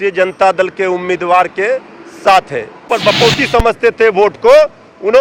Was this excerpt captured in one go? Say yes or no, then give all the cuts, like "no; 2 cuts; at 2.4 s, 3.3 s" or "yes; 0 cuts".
no; 1 cut; at 2.9 s